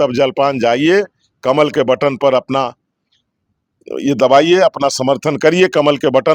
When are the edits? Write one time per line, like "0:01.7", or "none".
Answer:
none